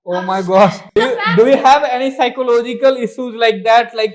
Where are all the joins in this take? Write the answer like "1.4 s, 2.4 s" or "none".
0.9 s

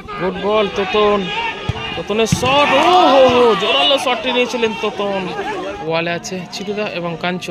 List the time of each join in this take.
5.8 s

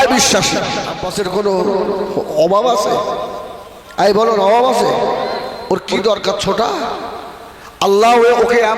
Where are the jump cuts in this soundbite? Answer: 0.9 s

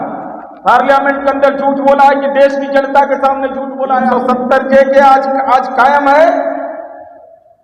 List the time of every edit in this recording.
4.1 s

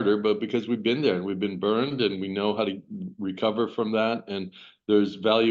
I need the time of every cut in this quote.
none

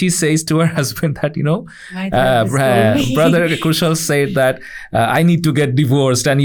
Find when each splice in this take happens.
none

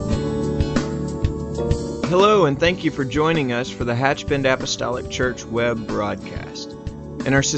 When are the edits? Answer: 2.1 s

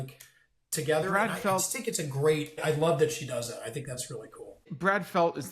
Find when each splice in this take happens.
2.6 s

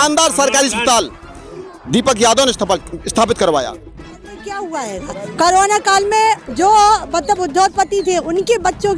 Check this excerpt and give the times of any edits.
4.4 s

